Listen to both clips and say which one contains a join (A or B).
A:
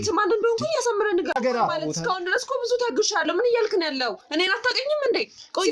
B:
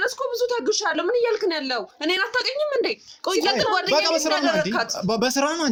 A